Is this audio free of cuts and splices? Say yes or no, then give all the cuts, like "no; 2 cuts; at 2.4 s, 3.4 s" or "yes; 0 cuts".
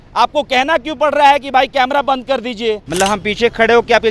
no; 1 cut; at 2.9 s